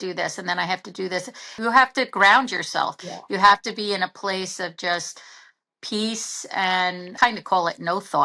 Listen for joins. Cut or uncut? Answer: cut